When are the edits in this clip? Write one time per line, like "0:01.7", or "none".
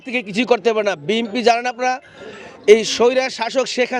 none